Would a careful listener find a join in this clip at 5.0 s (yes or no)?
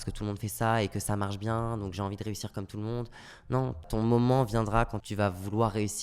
yes